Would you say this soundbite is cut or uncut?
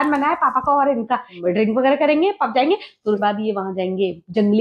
cut